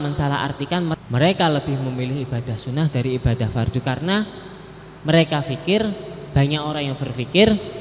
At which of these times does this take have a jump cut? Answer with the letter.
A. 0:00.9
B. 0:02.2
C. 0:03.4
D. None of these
A